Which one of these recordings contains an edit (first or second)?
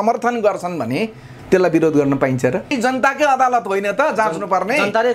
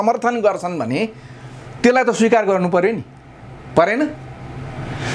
first